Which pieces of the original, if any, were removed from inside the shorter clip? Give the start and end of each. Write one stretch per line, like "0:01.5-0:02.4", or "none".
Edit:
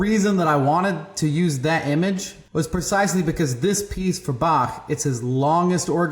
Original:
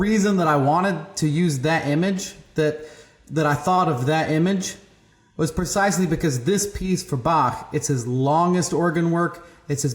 0:02.3-0:05.2